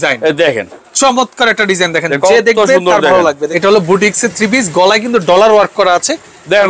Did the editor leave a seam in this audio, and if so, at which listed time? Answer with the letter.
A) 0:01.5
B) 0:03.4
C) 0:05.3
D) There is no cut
B